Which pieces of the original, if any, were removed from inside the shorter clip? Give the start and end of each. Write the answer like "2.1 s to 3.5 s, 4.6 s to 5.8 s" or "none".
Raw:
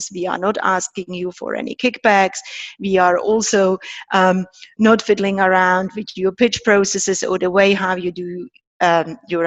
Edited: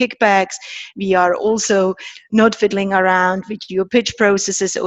3.9 s to 4.6 s